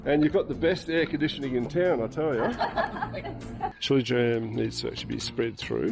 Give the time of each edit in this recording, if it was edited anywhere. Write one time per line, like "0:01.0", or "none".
0:03.8